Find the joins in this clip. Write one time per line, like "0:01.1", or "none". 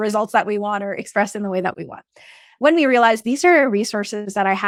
none